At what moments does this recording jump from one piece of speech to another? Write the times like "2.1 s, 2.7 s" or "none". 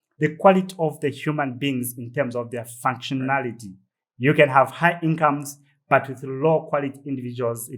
none